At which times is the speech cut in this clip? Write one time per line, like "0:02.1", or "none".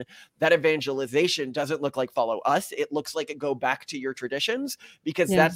none